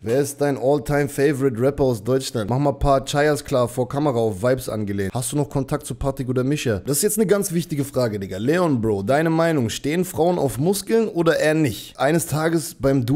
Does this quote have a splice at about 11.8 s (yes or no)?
yes